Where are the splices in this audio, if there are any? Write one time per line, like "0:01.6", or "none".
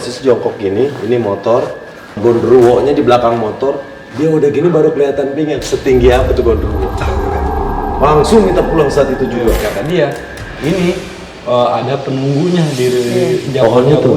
0:02.2
0:09.6